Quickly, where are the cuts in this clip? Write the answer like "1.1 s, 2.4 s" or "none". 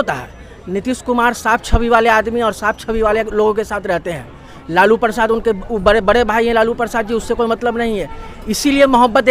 none